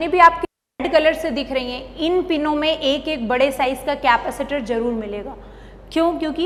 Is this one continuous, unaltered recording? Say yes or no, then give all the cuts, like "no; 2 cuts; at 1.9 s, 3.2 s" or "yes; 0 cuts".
yes; 0 cuts